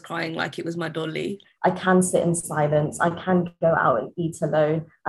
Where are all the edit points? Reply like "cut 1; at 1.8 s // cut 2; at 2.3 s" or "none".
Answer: cut 1; at 1.4 s